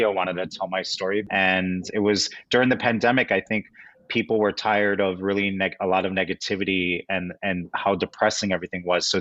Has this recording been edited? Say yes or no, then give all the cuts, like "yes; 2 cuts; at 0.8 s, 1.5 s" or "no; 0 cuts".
yes; 1 cut; at 1.3 s